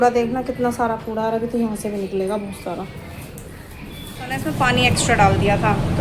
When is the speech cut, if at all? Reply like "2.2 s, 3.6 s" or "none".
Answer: 4.5 s

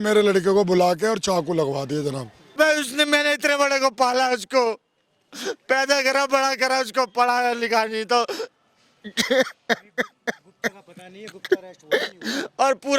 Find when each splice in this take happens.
2.6 s

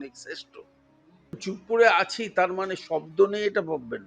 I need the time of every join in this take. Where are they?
1.4 s

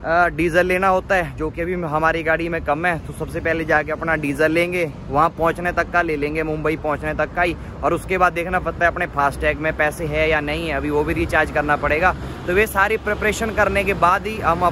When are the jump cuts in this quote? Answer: none

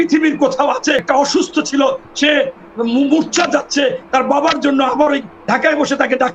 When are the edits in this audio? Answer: 1.0 s

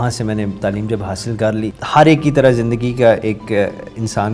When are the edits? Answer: 1.8 s

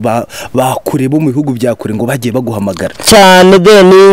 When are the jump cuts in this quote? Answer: none

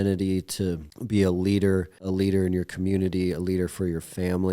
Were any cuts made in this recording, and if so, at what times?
0.9 s, 2.0 s

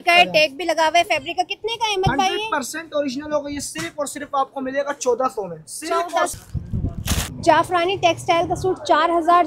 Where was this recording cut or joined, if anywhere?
6.3 s

